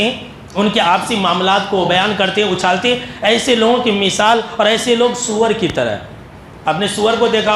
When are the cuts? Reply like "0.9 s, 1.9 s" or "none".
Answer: none